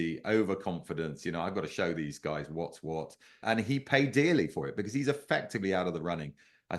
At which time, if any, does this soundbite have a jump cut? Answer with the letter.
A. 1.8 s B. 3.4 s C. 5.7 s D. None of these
B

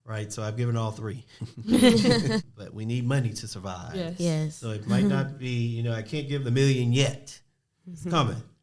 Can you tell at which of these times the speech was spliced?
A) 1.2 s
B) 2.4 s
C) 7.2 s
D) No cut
B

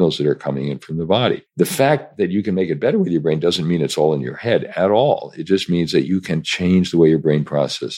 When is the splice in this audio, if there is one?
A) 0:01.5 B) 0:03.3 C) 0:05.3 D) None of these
A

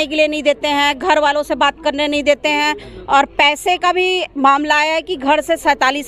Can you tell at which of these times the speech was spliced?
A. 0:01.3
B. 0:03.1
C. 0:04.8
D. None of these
D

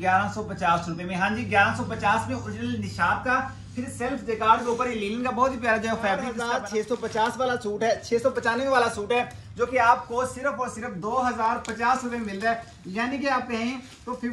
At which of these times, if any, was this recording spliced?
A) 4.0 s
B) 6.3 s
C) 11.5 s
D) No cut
B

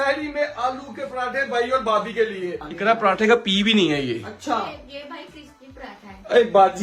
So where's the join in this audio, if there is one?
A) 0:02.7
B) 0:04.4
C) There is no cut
A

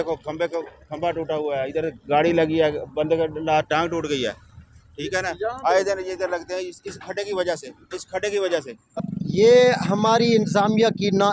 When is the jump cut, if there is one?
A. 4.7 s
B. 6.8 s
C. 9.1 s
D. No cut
C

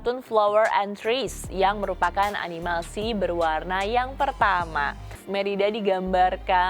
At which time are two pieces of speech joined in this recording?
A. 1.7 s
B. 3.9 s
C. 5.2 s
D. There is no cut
C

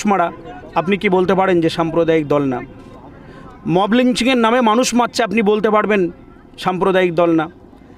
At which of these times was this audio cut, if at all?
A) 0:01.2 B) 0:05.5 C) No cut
C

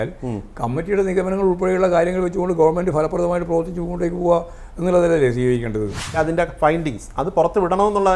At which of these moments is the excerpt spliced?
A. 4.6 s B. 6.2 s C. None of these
B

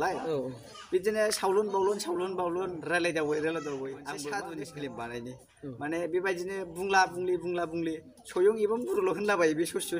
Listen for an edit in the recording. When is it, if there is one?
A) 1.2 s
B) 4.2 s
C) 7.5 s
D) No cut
B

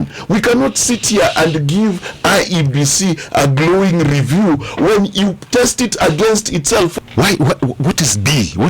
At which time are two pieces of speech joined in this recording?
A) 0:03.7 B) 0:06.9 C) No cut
B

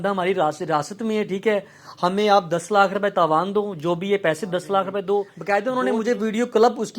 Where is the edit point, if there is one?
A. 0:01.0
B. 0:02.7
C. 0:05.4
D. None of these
C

